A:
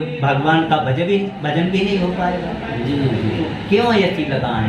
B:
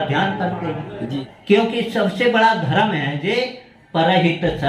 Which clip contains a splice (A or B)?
B